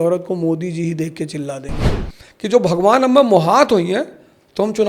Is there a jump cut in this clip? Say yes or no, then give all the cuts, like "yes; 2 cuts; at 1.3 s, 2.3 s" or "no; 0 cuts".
yes; 1 cut; at 1.8 s